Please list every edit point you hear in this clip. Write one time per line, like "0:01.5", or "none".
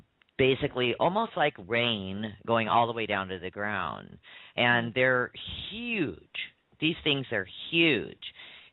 none